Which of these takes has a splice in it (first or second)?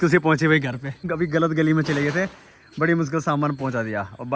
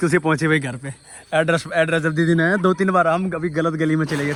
first